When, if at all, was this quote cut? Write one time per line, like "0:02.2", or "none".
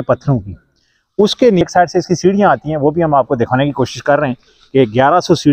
0:01.6